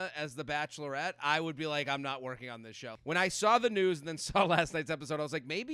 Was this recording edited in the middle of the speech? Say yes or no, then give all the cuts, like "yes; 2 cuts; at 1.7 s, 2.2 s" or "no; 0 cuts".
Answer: yes; 1 cut; at 2.9 s